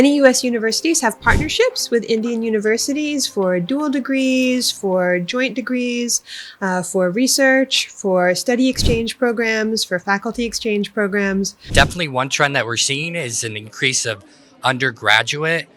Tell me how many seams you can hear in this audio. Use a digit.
1